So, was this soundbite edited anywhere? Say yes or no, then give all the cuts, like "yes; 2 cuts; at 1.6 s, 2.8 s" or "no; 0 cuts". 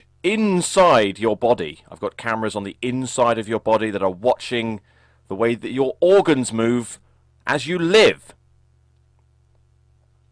yes; 1 cut; at 0.9 s